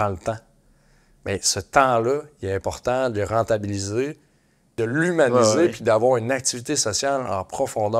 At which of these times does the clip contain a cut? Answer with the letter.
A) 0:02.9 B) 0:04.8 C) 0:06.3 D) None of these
B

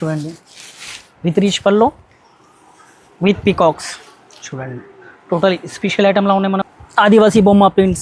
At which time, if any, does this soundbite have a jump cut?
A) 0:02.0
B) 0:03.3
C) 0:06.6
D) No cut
C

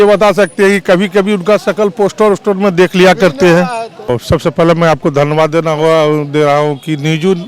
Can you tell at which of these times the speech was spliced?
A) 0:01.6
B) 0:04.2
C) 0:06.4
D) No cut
B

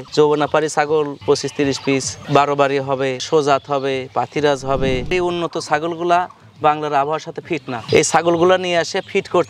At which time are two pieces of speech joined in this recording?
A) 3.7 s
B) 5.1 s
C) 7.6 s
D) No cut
B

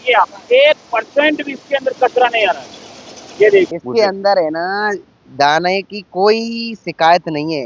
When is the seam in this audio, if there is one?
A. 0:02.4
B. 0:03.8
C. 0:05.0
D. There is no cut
B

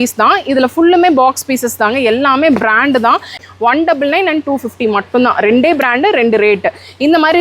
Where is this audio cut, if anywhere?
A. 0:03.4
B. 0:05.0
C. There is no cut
A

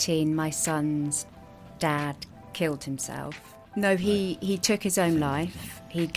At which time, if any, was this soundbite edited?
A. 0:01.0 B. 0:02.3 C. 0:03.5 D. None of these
C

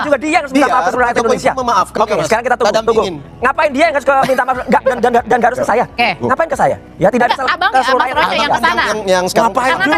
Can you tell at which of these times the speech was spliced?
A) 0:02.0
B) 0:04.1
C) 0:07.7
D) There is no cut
A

